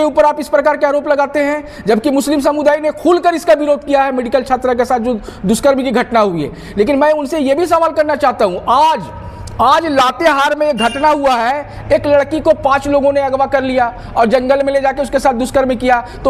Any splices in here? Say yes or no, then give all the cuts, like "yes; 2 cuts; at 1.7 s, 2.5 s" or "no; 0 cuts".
no; 0 cuts